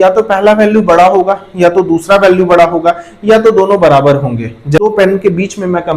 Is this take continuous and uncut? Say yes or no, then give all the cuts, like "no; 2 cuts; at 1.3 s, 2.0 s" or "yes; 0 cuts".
no; 1 cut; at 4.8 s